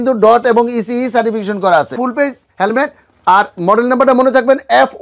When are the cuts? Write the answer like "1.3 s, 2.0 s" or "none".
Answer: 2.0 s